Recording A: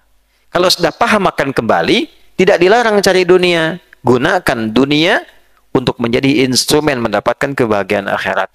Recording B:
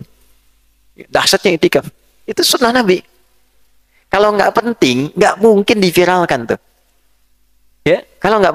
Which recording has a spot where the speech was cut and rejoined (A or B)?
B